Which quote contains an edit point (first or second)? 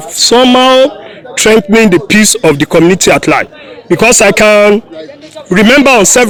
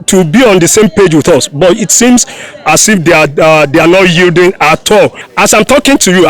second